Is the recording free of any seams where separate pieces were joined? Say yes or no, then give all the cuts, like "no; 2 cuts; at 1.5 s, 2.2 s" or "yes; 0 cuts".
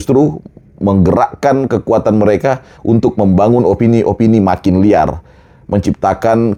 yes; 0 cuts